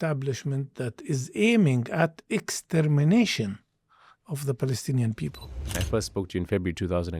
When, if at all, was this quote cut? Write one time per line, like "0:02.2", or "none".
0:05.8